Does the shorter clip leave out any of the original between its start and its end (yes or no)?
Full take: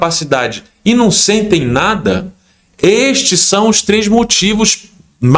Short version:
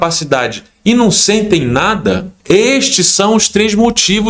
yes